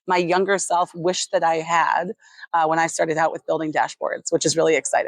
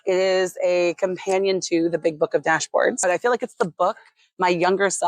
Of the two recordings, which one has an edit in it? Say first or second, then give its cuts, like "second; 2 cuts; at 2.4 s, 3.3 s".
second; 1 cut; at 3.0 s